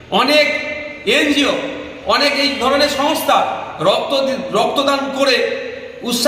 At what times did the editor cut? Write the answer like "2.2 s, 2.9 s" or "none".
none